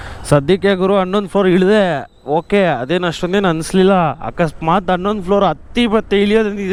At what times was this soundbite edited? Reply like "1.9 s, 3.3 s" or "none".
none